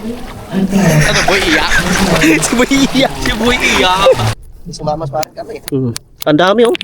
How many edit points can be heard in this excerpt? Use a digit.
1